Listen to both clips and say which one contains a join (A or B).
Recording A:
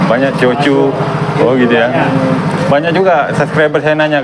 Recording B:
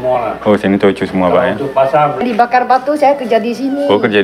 B